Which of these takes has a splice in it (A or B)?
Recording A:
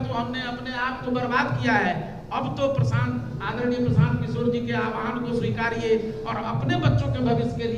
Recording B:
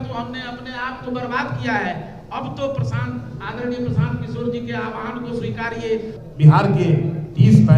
B